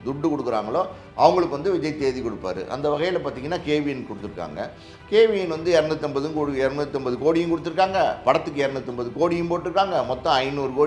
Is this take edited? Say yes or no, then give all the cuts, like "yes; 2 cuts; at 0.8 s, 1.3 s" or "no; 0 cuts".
no; 0 cuts